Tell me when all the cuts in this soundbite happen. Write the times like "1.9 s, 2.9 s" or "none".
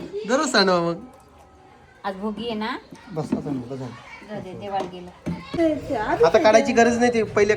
5.6 s